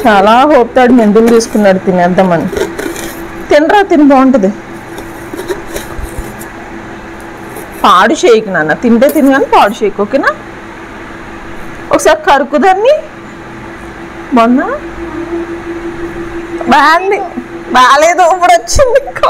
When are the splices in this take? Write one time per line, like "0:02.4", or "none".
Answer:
none